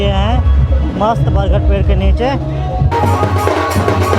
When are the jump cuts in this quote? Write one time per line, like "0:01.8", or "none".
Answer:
0:02.9